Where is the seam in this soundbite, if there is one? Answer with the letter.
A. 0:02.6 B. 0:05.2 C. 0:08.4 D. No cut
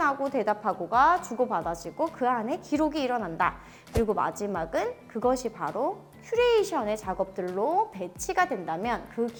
D